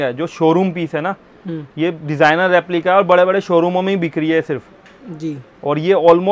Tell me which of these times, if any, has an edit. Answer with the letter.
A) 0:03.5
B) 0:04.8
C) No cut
C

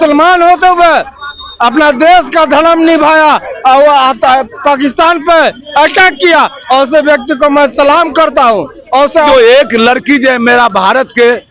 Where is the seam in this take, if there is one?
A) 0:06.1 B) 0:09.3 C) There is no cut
B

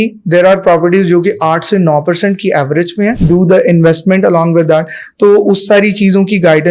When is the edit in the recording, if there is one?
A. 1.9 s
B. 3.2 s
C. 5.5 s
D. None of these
B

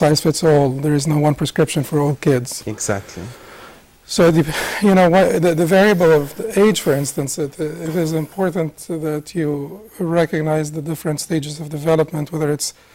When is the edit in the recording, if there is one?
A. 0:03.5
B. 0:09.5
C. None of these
C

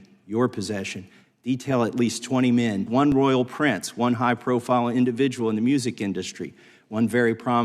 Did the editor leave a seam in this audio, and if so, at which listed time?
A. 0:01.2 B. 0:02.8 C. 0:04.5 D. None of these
B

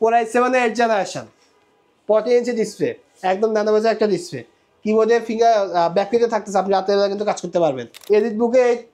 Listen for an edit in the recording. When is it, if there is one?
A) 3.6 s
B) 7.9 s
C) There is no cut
B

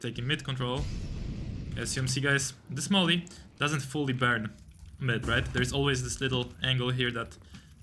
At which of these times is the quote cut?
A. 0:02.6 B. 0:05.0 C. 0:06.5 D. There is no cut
D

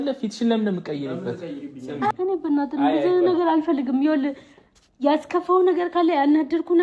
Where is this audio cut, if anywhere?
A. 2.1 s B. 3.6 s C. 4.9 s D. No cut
A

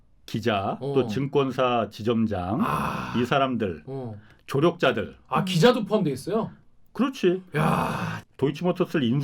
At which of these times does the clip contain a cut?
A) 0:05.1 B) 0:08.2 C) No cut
B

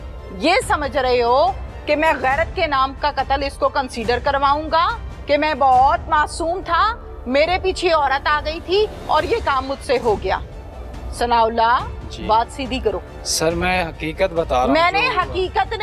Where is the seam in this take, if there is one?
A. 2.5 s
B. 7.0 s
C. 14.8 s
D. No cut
D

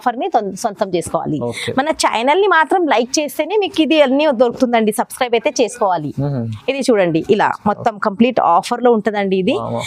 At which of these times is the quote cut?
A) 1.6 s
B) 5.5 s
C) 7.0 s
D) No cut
D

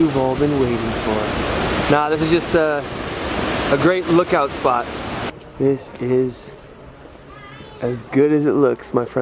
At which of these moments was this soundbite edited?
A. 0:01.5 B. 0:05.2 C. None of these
B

